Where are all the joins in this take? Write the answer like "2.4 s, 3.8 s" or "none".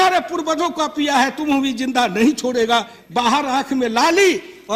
3.0 s

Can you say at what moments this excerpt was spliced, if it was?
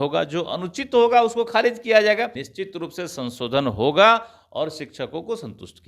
2.5 s

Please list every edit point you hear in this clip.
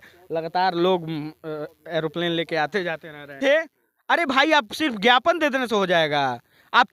3.4 s

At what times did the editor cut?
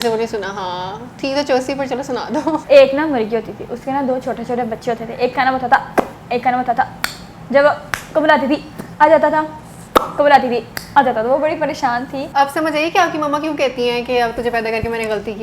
12.2 s

